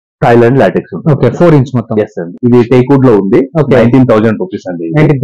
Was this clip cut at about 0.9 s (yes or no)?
no